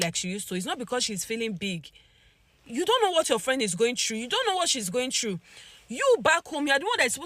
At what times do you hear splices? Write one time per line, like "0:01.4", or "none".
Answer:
none